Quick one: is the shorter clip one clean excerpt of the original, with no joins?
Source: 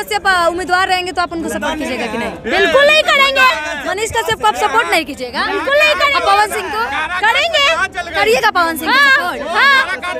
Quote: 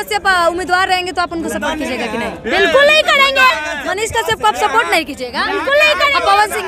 yes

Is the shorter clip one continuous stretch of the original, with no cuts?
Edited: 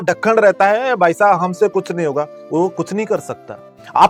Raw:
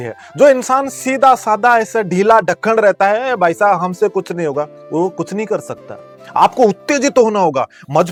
yes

